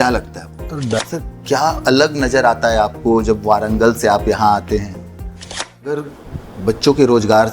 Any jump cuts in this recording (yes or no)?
yes